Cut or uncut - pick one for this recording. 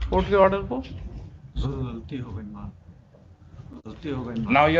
uncut